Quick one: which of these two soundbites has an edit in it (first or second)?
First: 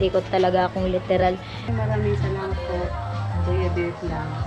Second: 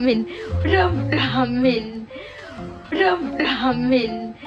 first